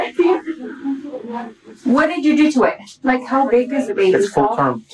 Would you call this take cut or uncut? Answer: cut